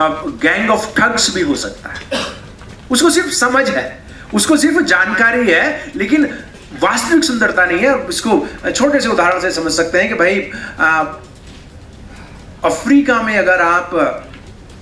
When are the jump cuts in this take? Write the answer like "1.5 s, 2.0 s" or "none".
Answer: none

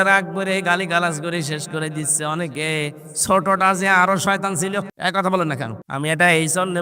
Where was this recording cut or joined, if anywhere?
4.9 s, 5.8 s

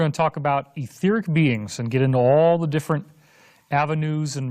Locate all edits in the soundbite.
1.3 s

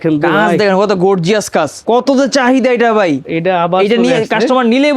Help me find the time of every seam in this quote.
1.8 s, 3.3 s

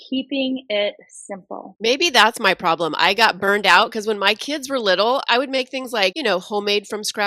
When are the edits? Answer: 1.6 s, 5.2 s, 6.2 s

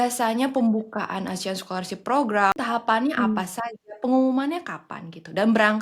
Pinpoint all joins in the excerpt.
2.5 s

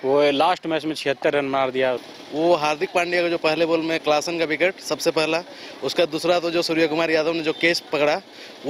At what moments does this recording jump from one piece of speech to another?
2.0 s

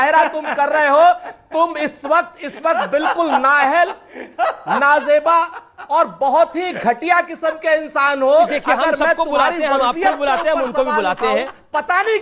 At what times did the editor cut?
none

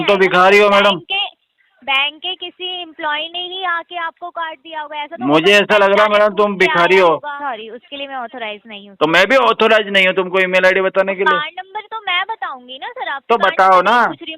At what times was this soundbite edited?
7.4 s

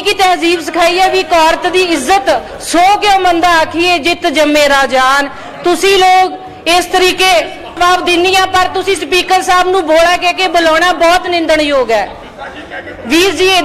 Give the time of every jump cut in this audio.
7.7 s

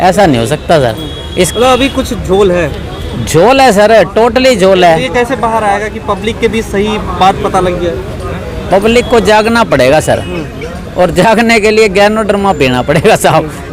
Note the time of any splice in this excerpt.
none

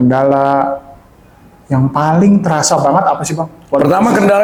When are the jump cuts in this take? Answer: none

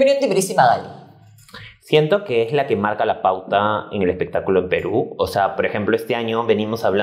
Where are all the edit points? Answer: none

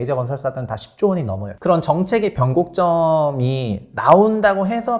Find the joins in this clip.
1.4 s

